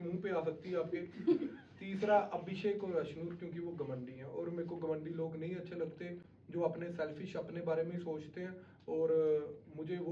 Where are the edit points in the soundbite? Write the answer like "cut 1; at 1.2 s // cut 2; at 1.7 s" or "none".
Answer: none